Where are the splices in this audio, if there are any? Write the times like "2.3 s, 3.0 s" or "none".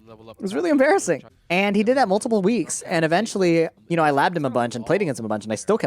1.3 s, 3.8 s